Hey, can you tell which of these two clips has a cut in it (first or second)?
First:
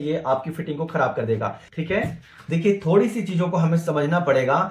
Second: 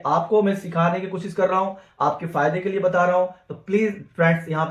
first